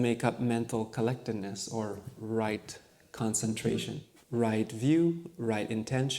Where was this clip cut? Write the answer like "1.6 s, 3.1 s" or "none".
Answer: 4.1 s